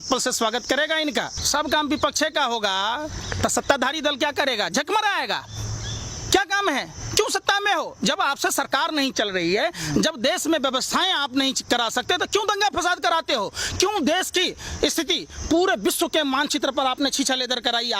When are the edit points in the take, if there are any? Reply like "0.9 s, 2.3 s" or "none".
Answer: 1.4 s